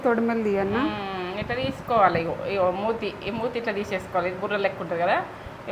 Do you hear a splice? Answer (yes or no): no